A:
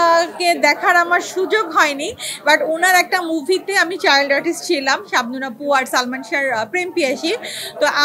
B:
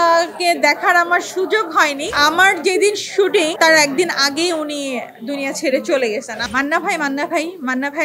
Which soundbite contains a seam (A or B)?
B